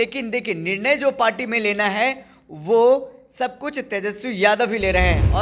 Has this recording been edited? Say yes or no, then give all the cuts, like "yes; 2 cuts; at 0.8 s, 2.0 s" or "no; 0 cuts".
no; 0 cuts